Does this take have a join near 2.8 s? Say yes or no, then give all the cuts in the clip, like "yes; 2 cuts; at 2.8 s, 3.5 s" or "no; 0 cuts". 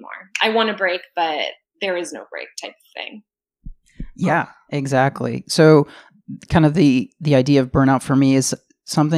no; 0 cuts